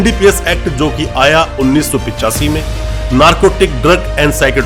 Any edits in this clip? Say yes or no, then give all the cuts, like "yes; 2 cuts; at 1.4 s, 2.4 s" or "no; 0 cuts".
no; 0 cuts